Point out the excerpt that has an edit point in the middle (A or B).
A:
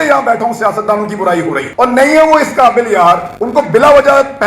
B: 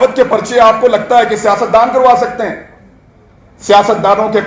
A